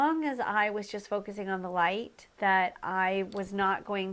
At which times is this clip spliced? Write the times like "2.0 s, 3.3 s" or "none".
2.9 s

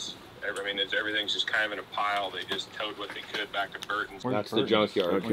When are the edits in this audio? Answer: 4.1 s

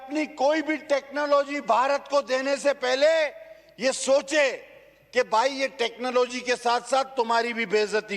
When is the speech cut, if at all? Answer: none

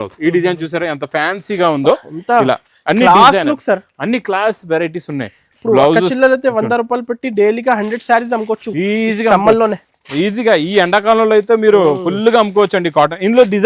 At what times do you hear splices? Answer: none

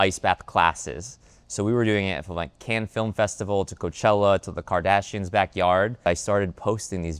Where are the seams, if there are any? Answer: 6.1 s

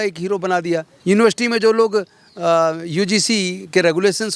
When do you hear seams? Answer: 0.9 s

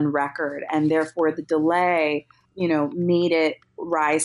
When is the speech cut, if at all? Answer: 2.4 s

